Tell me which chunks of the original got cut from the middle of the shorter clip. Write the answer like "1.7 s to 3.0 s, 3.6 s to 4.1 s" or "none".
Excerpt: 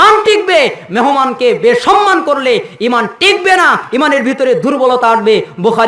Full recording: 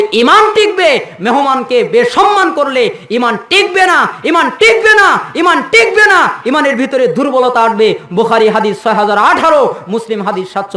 4.1 s to 6.4 s